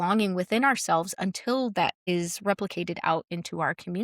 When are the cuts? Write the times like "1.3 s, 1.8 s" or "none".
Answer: 2.0 s